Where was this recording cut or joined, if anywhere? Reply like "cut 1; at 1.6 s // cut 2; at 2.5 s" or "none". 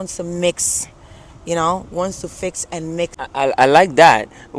cut 1; at 3.2 s